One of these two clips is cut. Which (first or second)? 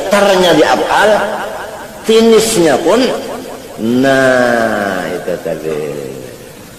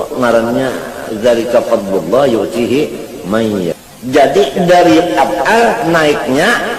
second